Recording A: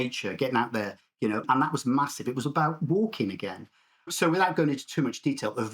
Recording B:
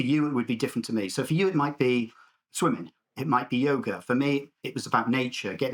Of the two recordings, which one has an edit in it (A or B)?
A